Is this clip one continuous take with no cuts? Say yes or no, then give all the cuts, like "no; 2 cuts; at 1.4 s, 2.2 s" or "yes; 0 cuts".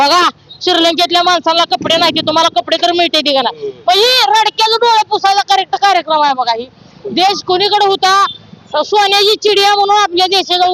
yes; 0 cuts